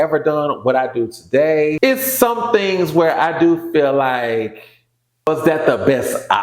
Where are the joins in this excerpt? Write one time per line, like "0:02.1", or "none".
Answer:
0:01.8
0:05.3